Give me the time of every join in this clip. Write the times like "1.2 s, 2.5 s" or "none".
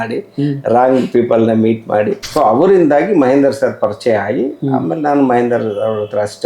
2.2 s

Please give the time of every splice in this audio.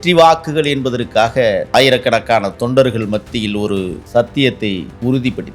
1.7 s

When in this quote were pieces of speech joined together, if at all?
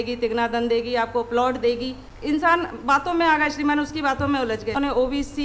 2.1 s, 4.8 s

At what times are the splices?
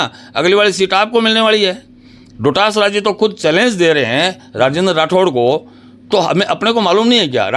none

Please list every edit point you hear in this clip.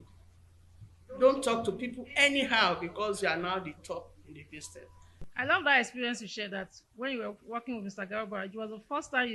5.3 s

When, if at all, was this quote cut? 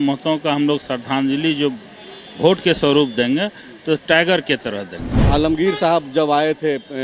5.2 s

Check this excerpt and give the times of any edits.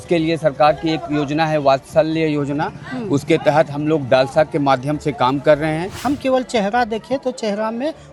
5.9 s

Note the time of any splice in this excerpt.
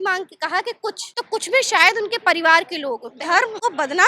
1.1 s, 3.3 s

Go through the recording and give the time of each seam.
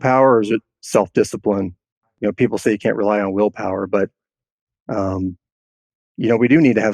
2.2 s

